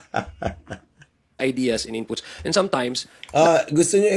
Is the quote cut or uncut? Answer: cut